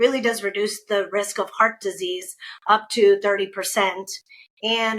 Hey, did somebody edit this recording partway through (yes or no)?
no